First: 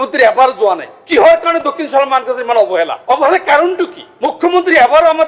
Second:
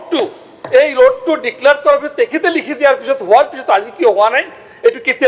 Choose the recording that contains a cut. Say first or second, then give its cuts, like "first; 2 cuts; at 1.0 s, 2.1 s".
first; 3 cuts; at 0.9 s, 3.0 s, 4.0 s